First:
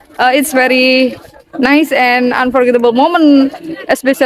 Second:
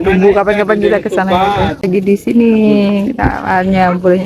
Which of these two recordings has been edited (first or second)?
second